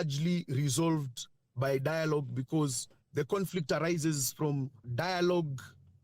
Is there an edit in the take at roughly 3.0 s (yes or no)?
no